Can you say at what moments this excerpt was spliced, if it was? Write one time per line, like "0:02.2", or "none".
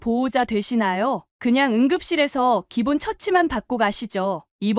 0:01.3